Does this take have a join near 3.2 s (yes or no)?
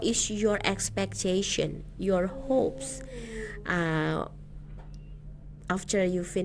no